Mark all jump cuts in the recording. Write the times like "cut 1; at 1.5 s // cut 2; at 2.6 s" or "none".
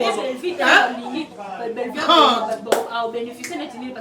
none